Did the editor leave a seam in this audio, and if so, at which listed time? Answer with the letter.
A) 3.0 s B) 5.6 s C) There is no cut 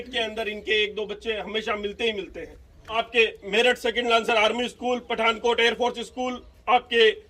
A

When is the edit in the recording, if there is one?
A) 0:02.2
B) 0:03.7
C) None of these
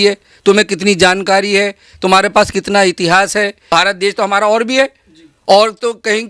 B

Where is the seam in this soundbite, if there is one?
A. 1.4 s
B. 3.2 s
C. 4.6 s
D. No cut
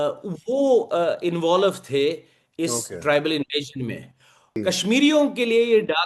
C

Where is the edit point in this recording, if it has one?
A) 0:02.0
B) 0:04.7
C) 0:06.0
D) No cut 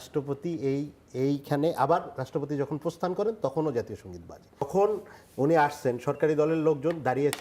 B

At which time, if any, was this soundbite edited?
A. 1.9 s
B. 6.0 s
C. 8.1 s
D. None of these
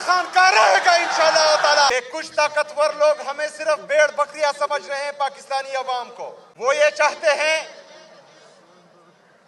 D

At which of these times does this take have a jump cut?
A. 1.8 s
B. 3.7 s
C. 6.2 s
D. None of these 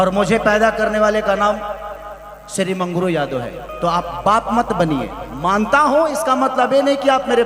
D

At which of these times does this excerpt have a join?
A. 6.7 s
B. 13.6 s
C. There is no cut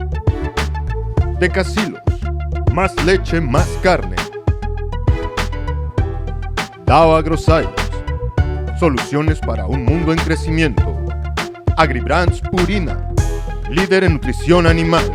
C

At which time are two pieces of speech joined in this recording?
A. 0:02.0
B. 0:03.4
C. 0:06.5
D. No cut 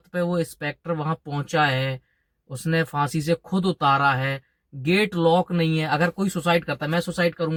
D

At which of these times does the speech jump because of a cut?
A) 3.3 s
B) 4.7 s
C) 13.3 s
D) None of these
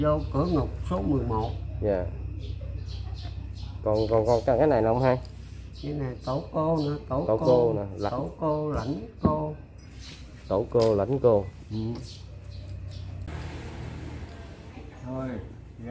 C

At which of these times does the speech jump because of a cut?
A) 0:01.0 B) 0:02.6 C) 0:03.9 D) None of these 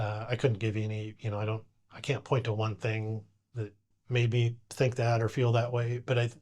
C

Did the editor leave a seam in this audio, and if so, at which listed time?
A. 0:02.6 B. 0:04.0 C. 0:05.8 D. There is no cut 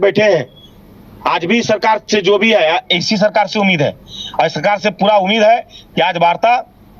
D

